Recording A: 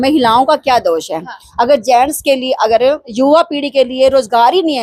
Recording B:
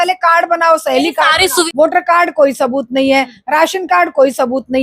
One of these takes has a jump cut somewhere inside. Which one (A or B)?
B